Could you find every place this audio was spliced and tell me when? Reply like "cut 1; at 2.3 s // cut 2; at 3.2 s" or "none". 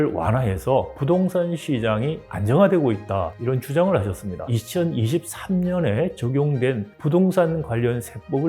cut 1; at 4.5 s